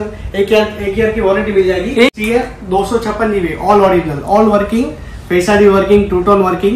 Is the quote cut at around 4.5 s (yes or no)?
no